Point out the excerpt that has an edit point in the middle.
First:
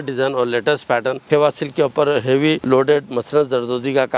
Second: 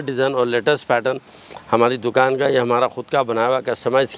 first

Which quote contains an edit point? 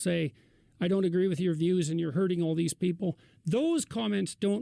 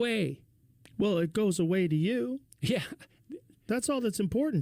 first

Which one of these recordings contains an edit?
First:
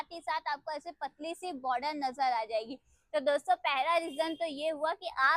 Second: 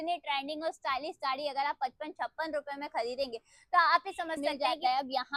second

